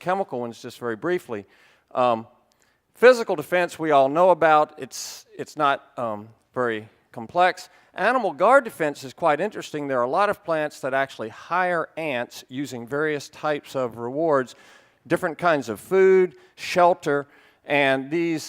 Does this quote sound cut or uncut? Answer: cut